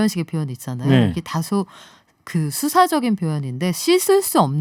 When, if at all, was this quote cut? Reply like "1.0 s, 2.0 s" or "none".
none